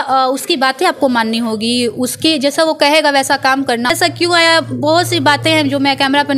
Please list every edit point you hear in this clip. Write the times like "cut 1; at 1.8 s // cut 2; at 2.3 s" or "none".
cut 1; at 3.9 s